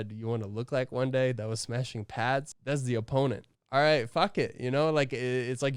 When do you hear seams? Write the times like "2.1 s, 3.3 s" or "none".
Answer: 2.5 s, 3.5 s

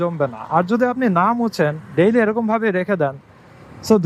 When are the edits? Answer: none

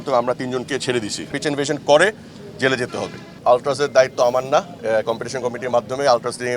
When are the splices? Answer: 1.2 s, 3.4 s

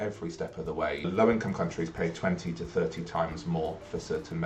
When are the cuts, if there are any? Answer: 1.0 s

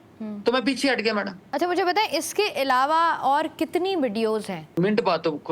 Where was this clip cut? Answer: 1.4 s, 4.8 s

